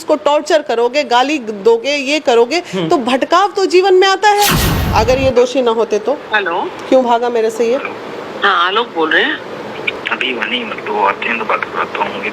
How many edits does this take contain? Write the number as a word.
two